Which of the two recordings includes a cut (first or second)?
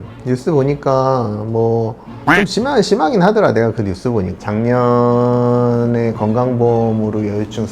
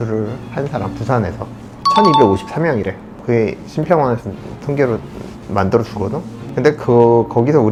first